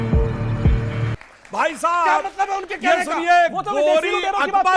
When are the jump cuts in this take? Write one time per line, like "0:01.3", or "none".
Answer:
0:01.2